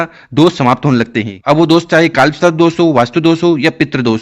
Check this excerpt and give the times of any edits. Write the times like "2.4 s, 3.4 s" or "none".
1.3 s